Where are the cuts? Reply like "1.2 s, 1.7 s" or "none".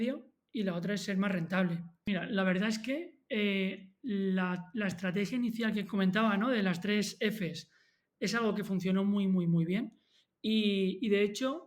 2.1 s

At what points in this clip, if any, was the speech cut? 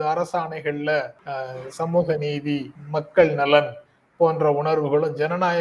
1.2 s, 2.8 s

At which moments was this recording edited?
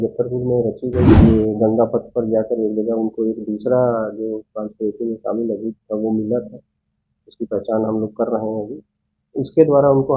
1.1 s

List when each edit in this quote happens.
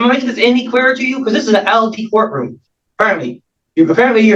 none

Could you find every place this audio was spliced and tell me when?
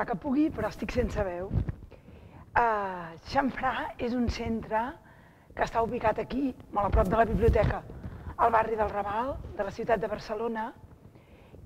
10.6 s

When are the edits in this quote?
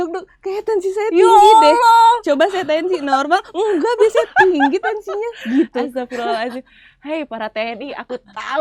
none

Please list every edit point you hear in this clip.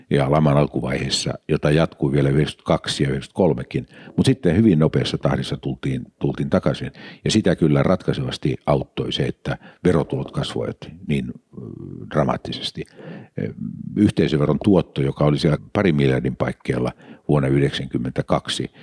15.6 s

